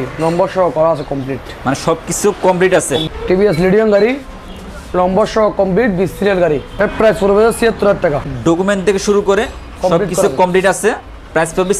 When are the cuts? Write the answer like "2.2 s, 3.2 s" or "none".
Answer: 3.1 s, 6.8 s, 8.3 s